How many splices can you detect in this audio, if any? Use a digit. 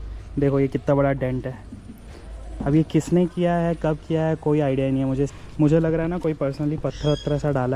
1